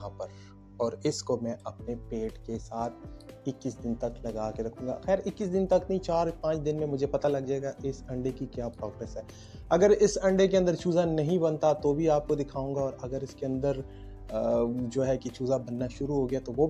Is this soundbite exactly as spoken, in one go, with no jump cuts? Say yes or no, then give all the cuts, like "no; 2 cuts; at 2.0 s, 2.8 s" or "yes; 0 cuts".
yes; 0 cuts